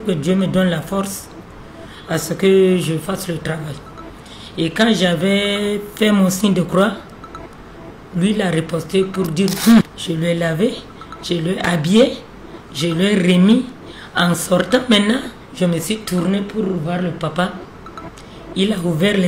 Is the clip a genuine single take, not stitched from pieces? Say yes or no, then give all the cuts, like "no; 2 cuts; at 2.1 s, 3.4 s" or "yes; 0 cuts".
no; 2 cuts; at 9.8 s, 15.4 s